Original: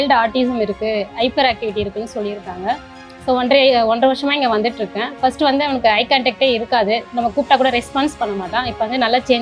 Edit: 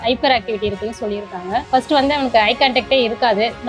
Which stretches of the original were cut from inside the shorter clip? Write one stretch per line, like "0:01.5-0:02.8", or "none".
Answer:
0:02.8-0:05.1